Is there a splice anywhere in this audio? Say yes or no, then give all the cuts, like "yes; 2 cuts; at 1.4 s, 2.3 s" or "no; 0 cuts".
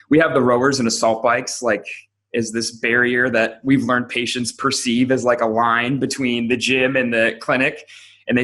no; 0 cuts